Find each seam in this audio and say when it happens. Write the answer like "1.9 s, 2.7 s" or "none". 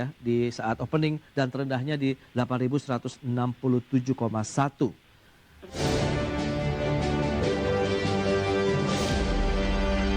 5.8 s